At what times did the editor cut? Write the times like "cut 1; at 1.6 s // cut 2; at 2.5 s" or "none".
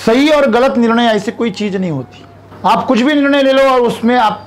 none